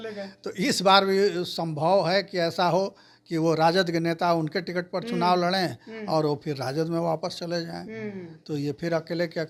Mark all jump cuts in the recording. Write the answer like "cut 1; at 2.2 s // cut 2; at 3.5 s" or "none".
none